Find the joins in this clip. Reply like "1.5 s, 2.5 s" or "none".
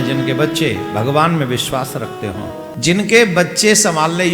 2.7 s